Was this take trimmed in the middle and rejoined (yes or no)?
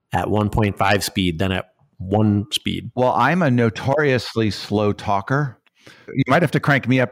yes